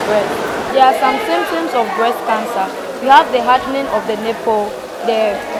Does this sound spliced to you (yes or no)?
no